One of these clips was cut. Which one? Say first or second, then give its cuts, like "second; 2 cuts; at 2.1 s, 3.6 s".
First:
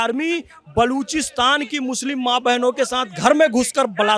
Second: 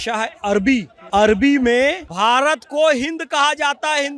second; 2 cuts; at 1.0 s, 2.1 s